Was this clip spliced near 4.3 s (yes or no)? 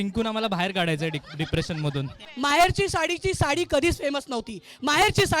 no